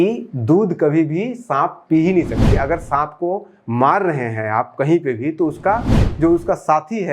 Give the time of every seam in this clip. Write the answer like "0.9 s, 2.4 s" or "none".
2.5 s, 6.0 s